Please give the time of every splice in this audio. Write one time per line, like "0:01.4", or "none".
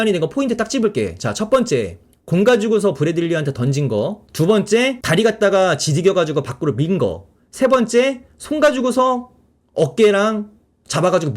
0:04.2
0:05.0